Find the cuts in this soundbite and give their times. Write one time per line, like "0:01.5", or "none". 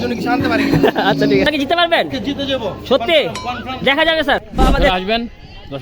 0:01.5
0:04.9

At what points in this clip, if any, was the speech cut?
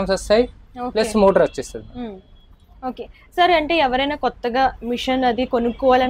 none

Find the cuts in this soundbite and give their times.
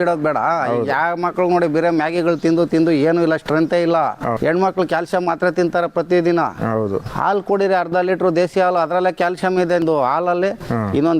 0:04.4
0:09.8

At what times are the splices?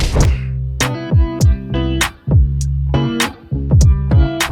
none

